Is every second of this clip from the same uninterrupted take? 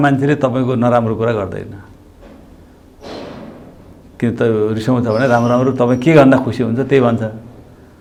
yes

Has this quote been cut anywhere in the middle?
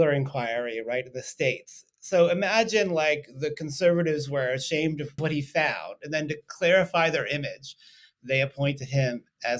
yes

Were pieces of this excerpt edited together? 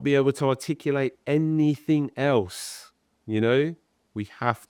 no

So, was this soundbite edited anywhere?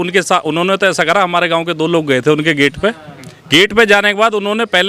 no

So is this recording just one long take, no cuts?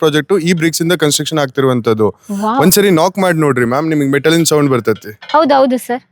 yes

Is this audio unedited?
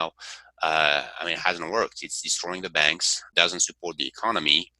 no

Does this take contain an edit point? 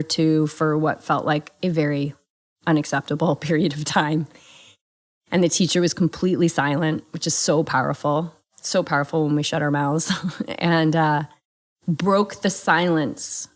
no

